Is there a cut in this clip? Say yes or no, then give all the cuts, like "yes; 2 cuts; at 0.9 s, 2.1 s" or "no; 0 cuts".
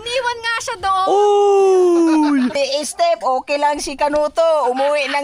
yes; 1 cut; at 2.6 s